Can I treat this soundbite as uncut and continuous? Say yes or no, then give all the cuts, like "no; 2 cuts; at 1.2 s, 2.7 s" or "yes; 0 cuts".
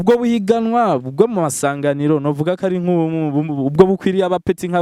yes; 0 cuts